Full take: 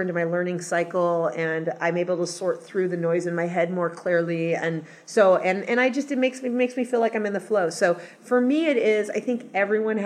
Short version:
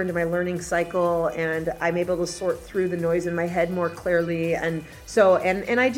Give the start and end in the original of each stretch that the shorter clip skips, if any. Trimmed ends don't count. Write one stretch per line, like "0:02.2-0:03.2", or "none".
none